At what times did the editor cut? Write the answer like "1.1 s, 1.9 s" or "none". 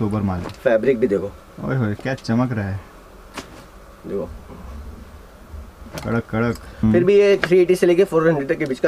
6.7 s